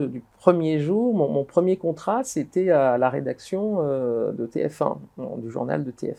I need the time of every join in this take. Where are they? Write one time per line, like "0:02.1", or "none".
none

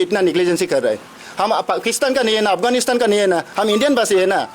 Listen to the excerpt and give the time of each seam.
0:01.2

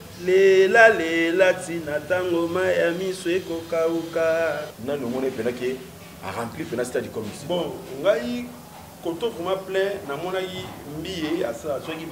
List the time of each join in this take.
0:04.7

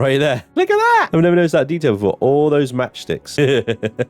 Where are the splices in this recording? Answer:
0:01.1
0:03.3

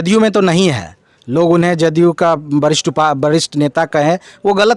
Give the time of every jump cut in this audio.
none

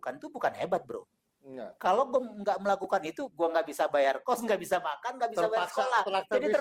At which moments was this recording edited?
none

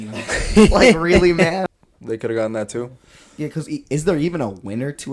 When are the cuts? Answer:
0:01.6

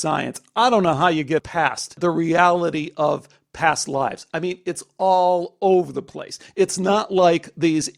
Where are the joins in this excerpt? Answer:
0:01.6

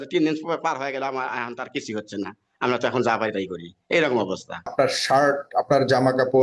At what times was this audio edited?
0:04.7

